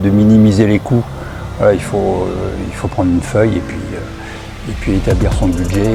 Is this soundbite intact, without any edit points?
yes; 0 cuts

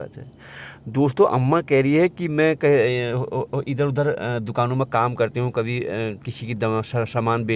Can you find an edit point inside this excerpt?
no; 0 cuts

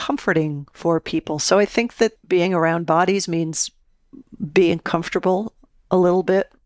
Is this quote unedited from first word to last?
yes; 0 cuts

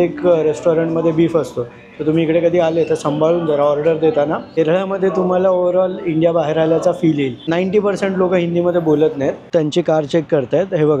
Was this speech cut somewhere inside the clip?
yes; 3 cuts; at 4.6 s, 7.4 s, 9.4 s

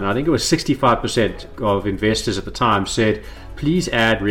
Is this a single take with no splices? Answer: yes; 0 cuts

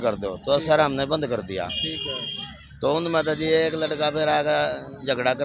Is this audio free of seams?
yes; 0 cuts

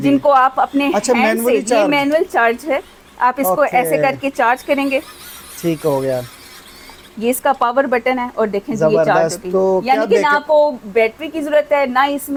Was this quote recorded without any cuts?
yes; 0 cuts

